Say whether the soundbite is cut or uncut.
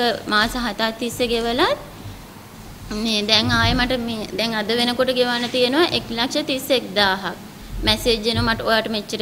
uncut